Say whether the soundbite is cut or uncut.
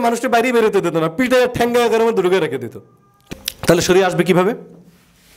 cut